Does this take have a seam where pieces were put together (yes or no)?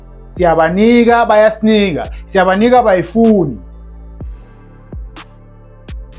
no